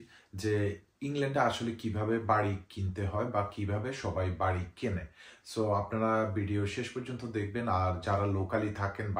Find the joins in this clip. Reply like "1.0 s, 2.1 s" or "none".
none